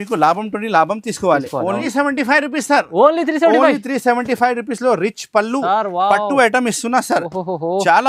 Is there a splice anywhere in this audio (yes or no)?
yes